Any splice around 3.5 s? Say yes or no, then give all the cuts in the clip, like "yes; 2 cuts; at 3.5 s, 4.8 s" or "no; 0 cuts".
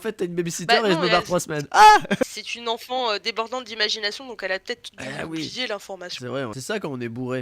no; 2 cuts; at 2.2 s, 6.5 s